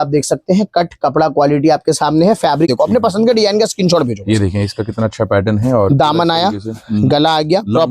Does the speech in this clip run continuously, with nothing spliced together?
no; 1 cut; at 2.7 s

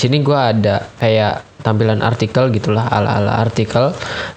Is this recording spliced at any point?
yes; 1 cut; at 0.9 s

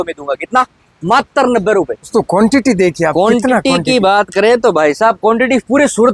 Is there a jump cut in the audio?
yes; 1 cut; at 2.1 s

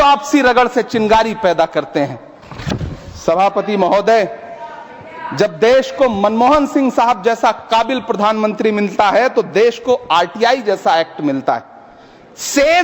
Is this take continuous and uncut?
yes; 0 cuts

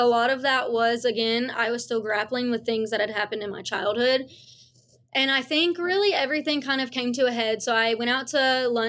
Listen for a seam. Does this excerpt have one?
no; 0 cuts

